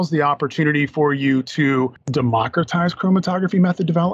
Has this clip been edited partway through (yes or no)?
yes